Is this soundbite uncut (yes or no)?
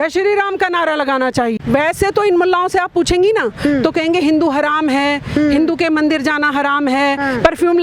no